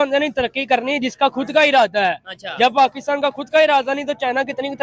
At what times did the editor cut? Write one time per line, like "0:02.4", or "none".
none